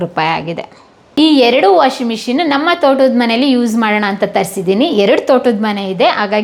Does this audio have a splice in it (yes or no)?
no